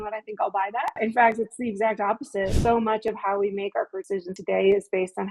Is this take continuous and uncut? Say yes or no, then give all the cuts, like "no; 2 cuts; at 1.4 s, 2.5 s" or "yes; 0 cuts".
no; 3 cuts; at 1.0 s, 2.5 s, 4.2 s